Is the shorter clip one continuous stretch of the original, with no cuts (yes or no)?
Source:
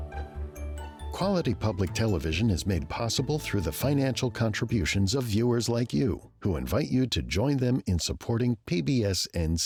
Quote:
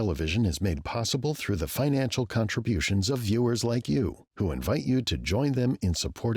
yes